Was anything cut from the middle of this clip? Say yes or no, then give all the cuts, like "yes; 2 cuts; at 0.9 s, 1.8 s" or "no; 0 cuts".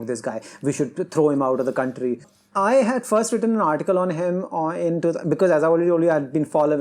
yes; 1 cut; at 2.3 s